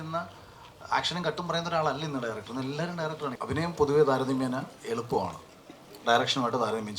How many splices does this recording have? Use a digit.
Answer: 1